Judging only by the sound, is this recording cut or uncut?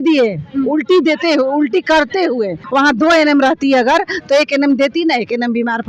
cut